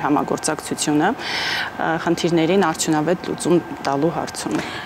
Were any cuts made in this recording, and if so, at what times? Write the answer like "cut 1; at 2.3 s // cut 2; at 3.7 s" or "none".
none